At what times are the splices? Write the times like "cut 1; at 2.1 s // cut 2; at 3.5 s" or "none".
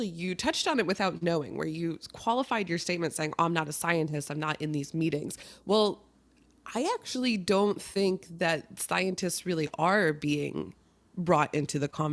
none